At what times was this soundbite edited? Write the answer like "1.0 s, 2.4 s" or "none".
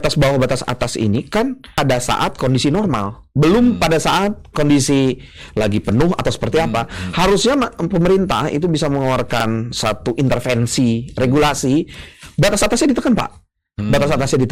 1.7 s